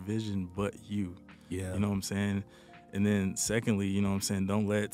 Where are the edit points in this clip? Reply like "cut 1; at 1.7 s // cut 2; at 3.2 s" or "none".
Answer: none